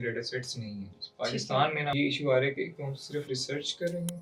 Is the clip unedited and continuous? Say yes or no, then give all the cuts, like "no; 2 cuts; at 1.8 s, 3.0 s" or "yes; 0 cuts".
no; 2 cuts; at 0.9 s, 1.9 s